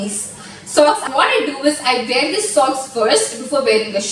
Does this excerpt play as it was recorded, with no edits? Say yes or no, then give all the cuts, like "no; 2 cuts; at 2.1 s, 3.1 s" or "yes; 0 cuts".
no; 1 cut; at 1.0 s